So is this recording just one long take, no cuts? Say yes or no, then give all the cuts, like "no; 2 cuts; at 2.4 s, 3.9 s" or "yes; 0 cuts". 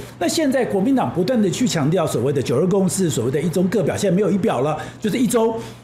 yes; 0 cuts